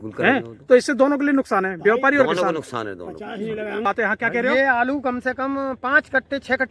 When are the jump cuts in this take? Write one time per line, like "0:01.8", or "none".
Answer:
0:03.8